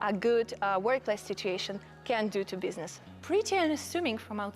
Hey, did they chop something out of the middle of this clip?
yes; 1 cut; at 3.1 s

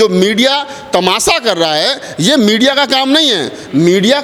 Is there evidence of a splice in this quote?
no; 0 cuts

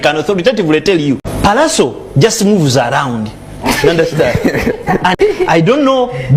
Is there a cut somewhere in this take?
yes; 2 cuts; at 1.3 s, 5.1 s

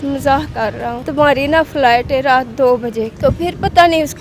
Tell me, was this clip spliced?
yes; 2 cuts; at 1.0 s, 3.1 s

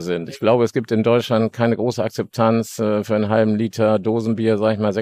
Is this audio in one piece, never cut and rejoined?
yes; 0 cuts

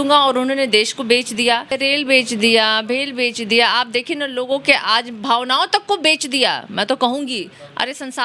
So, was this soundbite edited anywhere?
yes; 1 cut; at 1.7 s

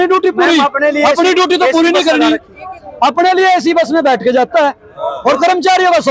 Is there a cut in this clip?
no; 0 cuts

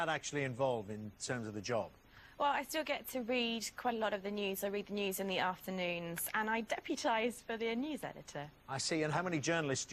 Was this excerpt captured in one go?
no; 1 cut; at 3.7 s

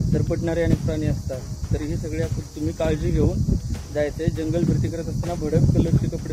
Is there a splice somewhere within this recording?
no; 0 cuts

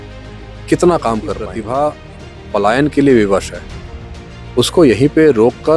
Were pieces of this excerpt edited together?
yes; 1 cut; at 1.5 s

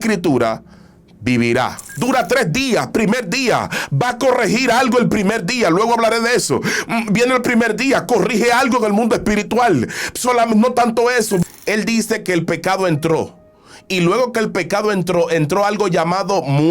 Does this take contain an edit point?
yes; 2 cuts; at 1.9 s, 11.4 s

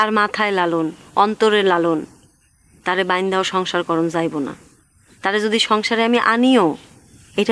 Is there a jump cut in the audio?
no; 0 cuts

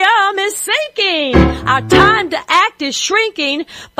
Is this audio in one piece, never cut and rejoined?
yes; 0 cuts

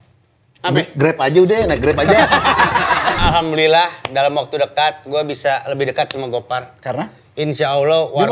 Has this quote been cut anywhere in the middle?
yes; 1 cut; at 3.2 s

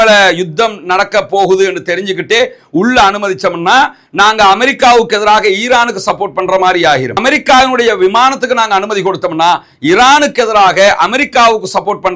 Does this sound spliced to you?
no; 0 cuts

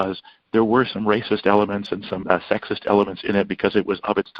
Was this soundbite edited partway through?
yes; 1 cut; at 2.2 s

